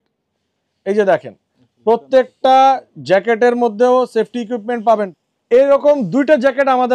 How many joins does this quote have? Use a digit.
1